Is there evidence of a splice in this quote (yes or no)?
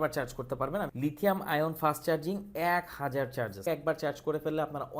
yes